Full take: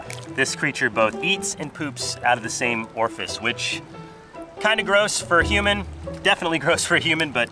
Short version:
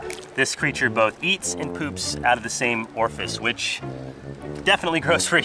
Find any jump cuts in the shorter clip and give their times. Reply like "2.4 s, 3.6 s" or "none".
4.4 s